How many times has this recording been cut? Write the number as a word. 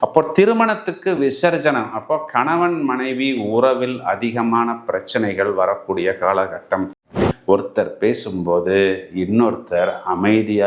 one